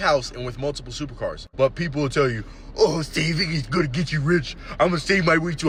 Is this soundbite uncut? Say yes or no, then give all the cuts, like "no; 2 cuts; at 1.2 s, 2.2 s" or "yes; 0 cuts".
yes; 0 cuts